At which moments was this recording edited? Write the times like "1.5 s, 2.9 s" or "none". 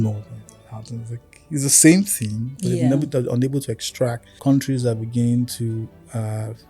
4.3 s